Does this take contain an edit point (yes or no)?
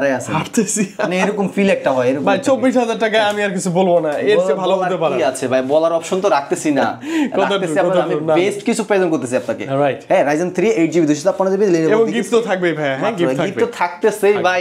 no